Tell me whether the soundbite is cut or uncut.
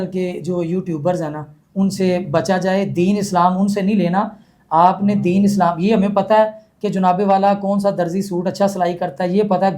uncut